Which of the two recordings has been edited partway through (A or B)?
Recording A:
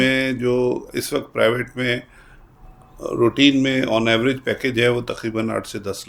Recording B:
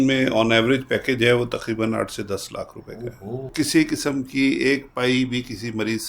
B